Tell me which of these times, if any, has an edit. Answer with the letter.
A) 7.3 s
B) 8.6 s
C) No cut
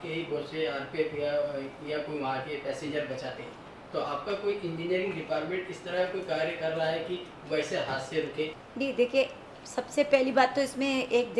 B